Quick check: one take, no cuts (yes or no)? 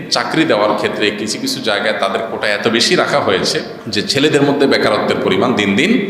no